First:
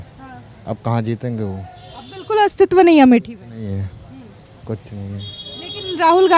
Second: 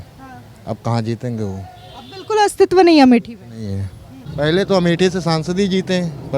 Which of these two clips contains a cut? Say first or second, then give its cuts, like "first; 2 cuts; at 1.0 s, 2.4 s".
second; 1 cut; at 4.2 s